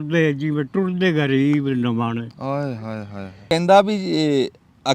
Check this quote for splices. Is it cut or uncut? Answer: cut